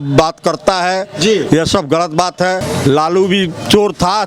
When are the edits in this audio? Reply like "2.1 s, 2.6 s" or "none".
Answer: 2.6 s